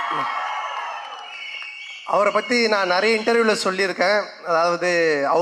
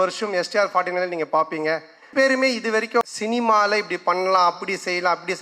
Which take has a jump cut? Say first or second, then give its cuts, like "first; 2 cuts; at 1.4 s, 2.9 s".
second; 2 cuts; at 2.1 s, 3.0 s